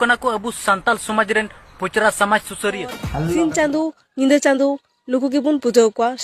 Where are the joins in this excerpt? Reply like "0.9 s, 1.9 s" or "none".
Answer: 2.9 s